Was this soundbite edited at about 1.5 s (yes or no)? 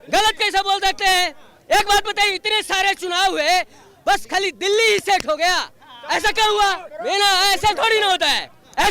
no